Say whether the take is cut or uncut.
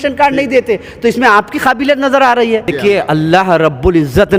cut